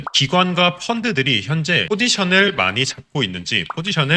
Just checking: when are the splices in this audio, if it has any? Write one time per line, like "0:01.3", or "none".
none